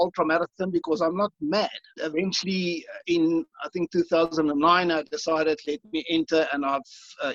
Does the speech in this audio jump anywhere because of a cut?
yes; 1 cut; at 2.0 s

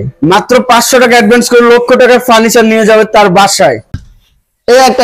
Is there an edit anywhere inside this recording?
yes; 1 cut; at 3.9 s

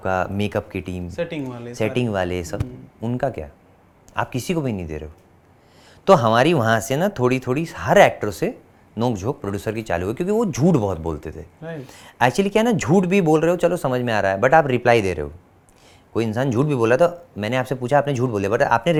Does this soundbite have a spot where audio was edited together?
no; 0 cuts

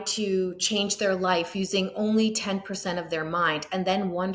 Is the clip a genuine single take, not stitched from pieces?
yes; 0 cuts

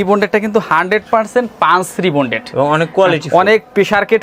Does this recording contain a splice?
no; 0 cuts

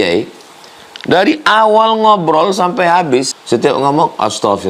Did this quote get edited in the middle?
yes; 1 cut; at 3.4 s

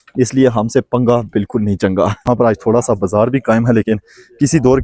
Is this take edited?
yes; 1 cut; at 2.2 s

